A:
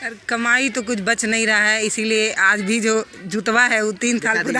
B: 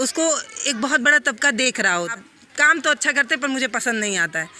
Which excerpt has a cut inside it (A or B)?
B